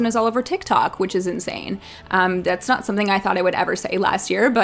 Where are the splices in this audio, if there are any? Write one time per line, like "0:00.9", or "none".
none